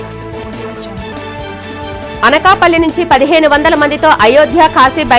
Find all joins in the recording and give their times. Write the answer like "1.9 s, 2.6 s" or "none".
1.1 s